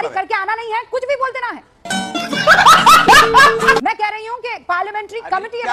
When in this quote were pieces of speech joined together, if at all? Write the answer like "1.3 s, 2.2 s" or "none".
none